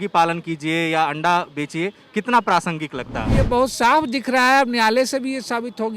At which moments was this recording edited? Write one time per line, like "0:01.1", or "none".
0:03.4